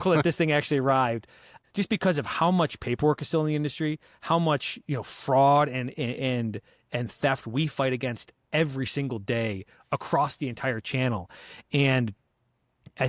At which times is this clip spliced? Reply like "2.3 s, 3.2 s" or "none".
1.5 s

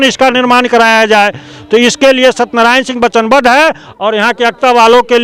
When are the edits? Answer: none

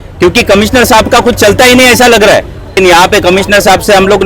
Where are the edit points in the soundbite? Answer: 2.8 s

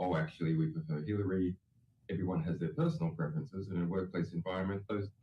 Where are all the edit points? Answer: 1.6 s

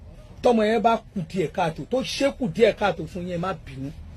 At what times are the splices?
1.2 s

